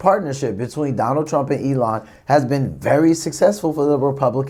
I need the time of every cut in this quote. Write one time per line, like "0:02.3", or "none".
none